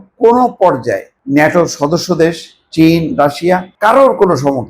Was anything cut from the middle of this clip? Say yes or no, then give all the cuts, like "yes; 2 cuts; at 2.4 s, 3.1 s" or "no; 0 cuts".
yes; 2 cuts; at 1.1 s, 3.7 s